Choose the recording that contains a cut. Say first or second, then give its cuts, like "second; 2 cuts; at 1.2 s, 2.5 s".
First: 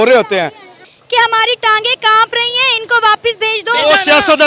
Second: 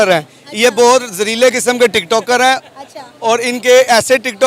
first; 1 cut; at 0.9 s